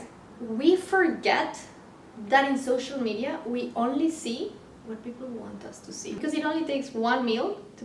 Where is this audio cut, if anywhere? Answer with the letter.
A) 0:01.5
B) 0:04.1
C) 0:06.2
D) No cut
C